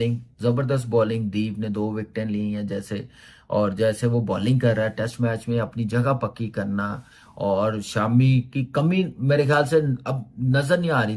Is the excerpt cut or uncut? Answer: uncut